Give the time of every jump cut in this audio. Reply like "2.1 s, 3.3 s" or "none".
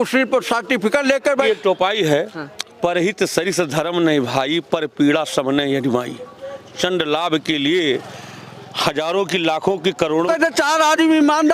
1.5 s, 10.3 s